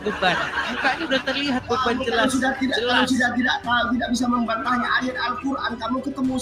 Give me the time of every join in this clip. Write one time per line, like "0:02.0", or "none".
0:04.8